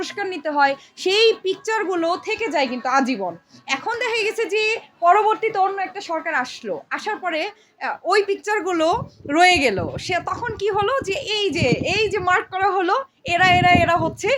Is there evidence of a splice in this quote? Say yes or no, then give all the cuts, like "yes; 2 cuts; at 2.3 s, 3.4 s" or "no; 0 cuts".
no; 0 cuts